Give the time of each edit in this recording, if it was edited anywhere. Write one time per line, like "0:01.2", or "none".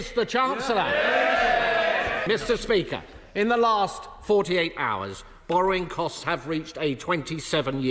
0:02.2